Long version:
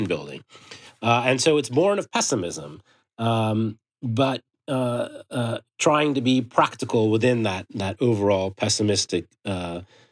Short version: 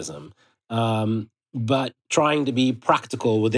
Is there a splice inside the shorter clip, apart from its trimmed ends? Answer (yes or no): yes